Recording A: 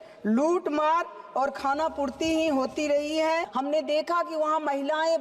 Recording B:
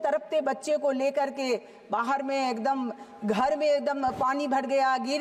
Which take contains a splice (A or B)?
A